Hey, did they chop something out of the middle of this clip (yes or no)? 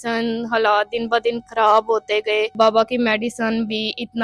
yes